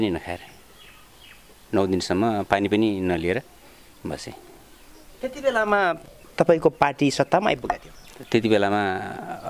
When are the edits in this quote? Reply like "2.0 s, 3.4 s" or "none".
none